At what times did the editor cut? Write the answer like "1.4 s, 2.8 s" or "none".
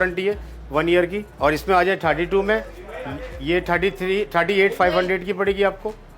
none